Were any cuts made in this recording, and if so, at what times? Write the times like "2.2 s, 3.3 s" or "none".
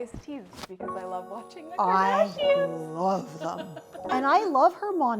4.1 s